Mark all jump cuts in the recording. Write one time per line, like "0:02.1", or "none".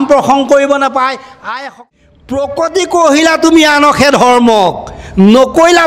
0:01.8